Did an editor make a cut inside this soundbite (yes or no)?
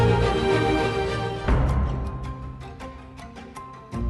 yes